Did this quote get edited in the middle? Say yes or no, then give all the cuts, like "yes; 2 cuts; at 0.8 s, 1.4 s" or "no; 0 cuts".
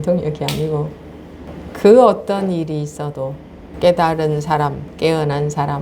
yes; 2 cuts; at 1.5 s, 3.6 s